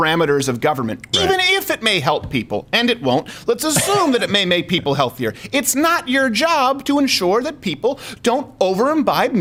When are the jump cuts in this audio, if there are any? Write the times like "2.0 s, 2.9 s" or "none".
none